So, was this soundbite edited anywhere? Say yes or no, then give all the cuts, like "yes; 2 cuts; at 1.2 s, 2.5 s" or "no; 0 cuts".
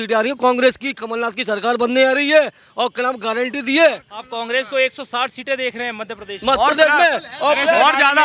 no; 0 cuts